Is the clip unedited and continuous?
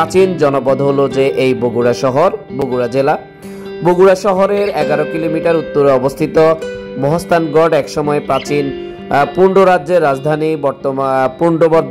yes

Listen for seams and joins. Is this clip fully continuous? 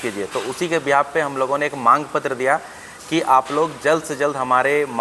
yes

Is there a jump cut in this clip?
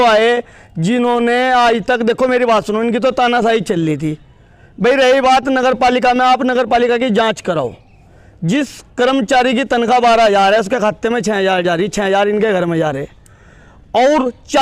no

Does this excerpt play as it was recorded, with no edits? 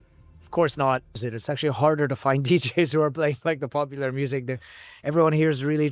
no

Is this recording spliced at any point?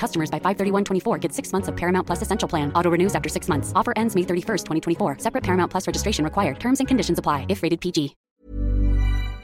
yes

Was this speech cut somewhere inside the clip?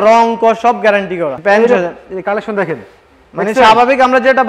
yes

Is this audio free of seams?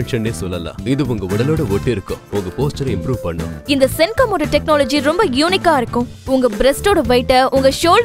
no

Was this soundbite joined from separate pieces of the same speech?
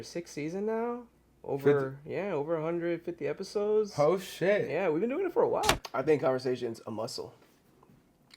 yes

